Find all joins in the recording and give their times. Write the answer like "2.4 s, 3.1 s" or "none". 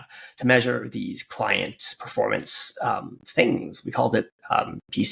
none

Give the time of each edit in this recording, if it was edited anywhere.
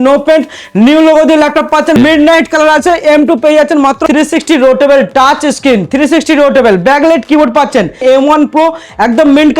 2.0 s, 4.0 s, 8.0 s

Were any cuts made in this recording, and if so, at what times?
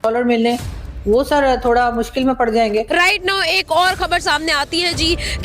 2.9 s

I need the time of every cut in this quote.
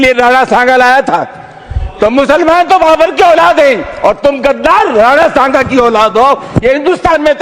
none

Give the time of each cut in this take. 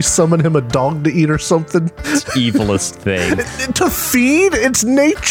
2.0 s

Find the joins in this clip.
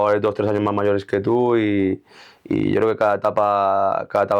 none

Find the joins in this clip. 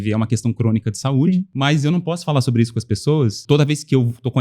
1.5 s, 3.4 s

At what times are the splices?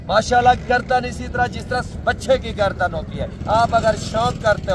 3.3 s

